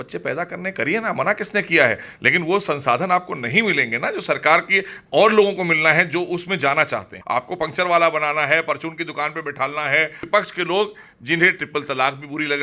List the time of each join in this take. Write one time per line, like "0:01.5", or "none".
0:07.1
0:10.3